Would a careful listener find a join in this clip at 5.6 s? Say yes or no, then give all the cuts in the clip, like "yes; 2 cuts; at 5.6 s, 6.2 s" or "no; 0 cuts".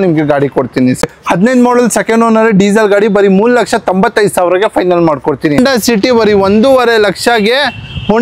yes; 2 cuts; at 1.0 s, 5.6 s